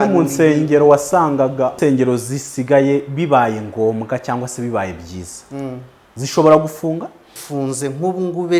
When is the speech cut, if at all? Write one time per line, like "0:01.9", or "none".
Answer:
0:01.7
0:07.3